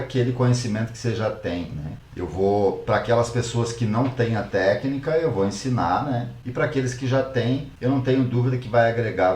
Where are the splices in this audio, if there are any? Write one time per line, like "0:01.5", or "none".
0:02.0
0:06.4
0:07.7